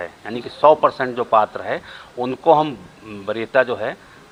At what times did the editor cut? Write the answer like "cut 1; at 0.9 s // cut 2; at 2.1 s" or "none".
none